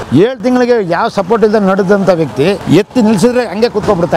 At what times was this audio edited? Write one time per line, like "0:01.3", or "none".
0:02.6